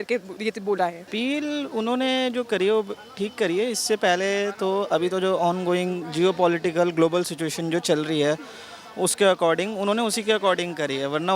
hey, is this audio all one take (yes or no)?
no